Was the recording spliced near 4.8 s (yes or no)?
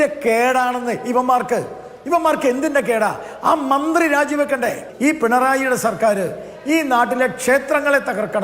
yes